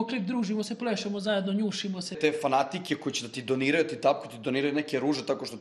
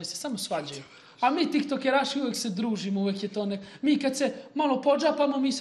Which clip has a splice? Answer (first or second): first